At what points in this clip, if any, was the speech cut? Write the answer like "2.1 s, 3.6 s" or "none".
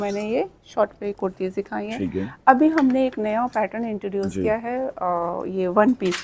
none